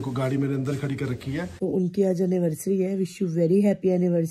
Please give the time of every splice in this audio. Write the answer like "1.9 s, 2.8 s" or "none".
1.5 s